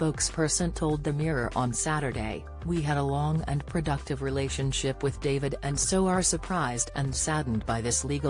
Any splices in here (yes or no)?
no